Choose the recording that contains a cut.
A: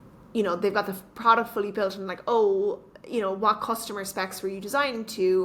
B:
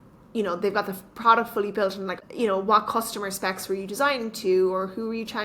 B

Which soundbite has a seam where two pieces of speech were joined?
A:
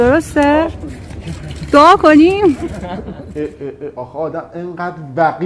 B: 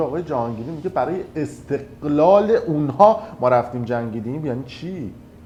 A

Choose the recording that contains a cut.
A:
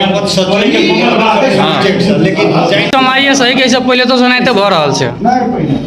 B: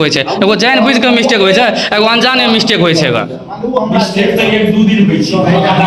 A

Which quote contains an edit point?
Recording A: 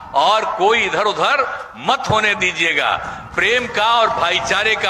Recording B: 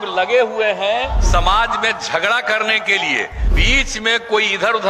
B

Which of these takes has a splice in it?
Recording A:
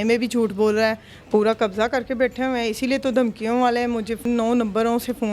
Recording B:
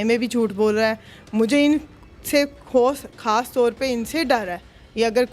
A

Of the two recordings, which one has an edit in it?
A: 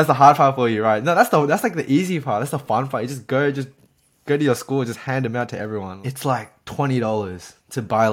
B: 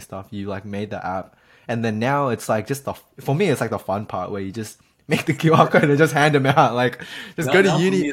A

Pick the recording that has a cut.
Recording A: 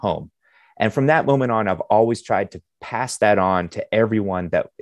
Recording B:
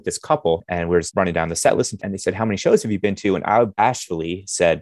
B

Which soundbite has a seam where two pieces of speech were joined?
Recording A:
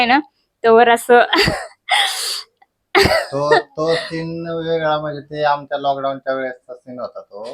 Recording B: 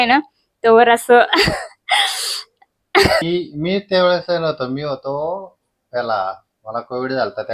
B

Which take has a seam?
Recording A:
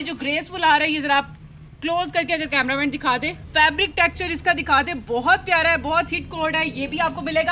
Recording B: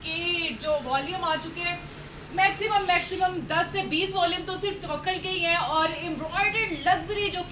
A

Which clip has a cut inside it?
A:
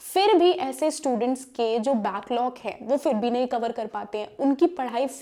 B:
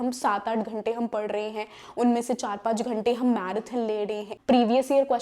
B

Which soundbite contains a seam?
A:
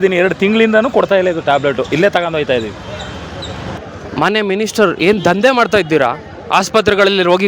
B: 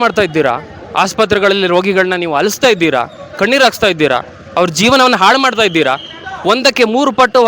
A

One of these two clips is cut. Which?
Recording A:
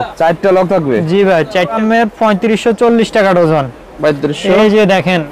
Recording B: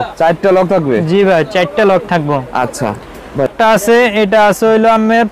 A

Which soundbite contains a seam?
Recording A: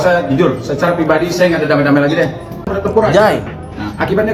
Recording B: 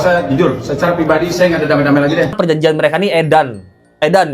B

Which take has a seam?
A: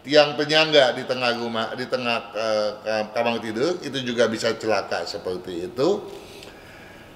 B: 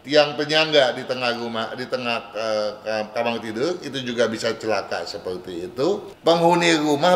B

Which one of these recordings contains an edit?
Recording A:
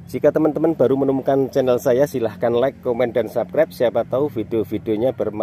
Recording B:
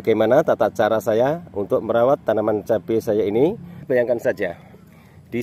B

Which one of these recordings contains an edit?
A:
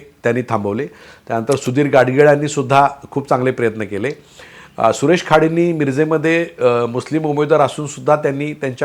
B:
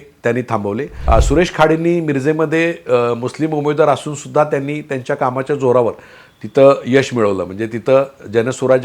B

